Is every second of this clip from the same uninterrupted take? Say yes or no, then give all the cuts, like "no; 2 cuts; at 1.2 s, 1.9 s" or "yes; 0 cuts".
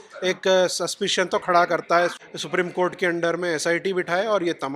no; 1 cut; at 2.2 s